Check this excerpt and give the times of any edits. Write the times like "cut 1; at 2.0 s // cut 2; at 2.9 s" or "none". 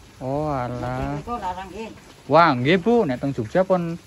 none